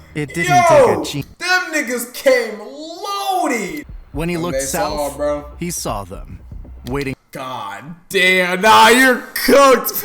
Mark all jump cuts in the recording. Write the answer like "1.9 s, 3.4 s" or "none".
1.3 s, 3.8 s